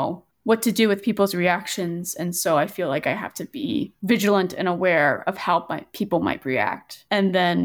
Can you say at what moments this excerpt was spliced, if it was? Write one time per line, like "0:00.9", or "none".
none